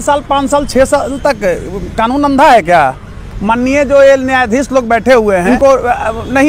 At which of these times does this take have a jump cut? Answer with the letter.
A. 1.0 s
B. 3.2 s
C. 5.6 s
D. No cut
C